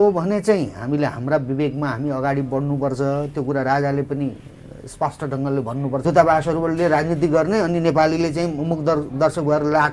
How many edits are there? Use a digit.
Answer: 1